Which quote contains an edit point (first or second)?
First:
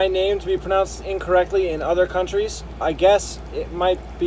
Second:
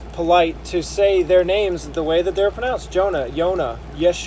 first